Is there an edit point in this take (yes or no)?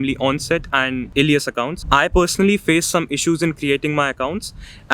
yes